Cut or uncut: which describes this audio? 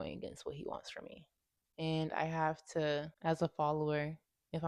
cut